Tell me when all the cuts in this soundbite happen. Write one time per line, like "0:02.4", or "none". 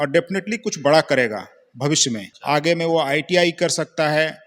0:02.3